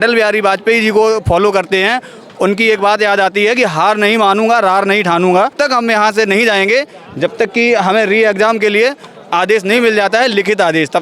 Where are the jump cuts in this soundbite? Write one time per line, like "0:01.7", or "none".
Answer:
0:05.5